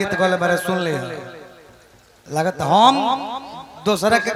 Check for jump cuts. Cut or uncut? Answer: uncut